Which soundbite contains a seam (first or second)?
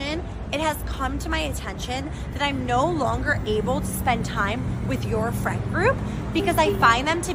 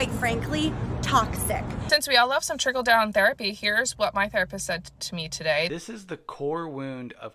second